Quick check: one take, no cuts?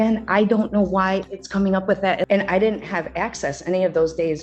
no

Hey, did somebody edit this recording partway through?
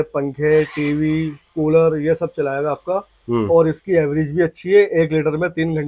no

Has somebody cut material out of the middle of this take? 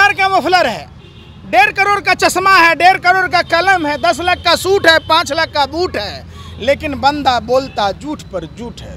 no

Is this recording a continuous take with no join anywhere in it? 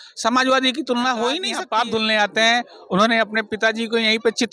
no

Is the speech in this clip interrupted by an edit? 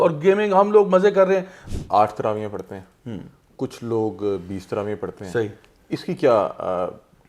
yes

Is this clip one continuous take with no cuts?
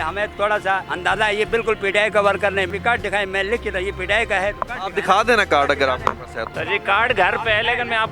no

